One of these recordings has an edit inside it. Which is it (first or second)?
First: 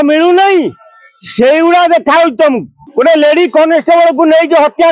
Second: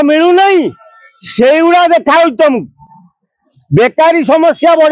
first